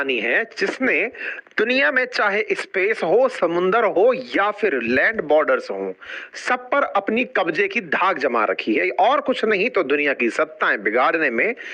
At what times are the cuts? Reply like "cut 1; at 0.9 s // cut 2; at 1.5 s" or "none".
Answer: none